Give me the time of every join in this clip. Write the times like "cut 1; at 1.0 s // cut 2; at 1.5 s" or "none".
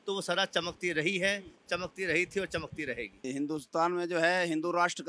cut 1; at 3.2 s

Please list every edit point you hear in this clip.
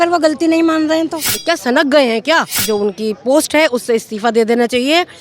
cut 1; at 1.3 s // cut 2; at 2.6 s

